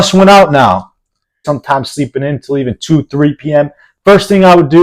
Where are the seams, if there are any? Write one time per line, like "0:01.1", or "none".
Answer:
0:01.4